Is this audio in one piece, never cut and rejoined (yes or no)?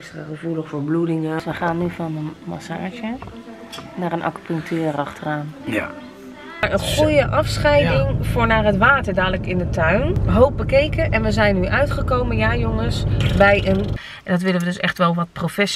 no